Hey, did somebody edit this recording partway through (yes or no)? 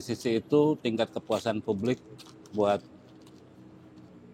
no